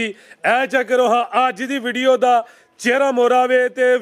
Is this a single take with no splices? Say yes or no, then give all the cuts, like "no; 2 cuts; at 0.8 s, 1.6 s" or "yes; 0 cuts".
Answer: yes; 0 cuts